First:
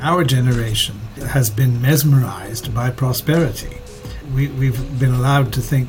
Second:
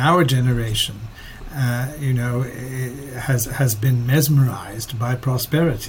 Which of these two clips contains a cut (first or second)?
first